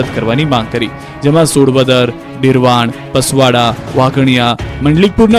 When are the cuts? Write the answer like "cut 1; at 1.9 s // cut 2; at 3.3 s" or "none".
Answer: cut 1; at 2.6 s